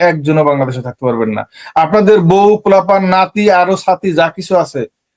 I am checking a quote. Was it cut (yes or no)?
no